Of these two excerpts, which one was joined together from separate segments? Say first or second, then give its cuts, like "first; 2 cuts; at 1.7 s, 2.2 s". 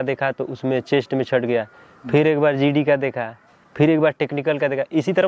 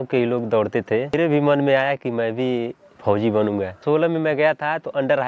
second; 2 cuts; at 1.2 s, 3.8 s